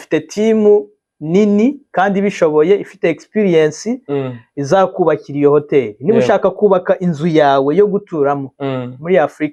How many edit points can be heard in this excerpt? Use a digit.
0